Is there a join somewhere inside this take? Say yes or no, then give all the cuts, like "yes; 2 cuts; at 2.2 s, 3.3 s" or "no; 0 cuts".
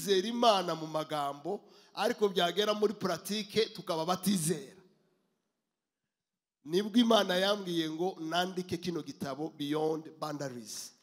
no; 0 cuts